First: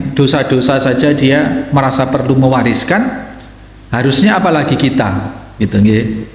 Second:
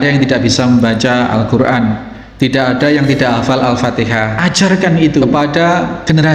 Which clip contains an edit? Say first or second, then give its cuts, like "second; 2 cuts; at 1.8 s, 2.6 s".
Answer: second; 2 cuts; at 4.3 s, 5.3 s